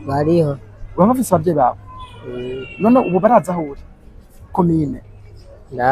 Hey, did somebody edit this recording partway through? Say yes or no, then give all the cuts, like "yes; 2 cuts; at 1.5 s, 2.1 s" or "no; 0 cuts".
yes; 1 cut; at 4.5 s